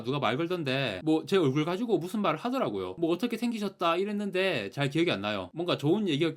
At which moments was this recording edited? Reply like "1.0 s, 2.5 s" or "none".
none